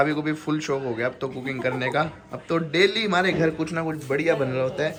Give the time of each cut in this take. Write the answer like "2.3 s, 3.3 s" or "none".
none